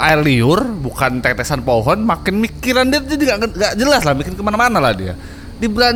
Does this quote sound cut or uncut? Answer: uncut